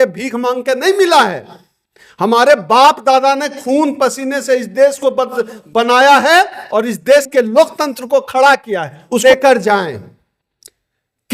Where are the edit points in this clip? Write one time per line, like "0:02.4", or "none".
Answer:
0:09.2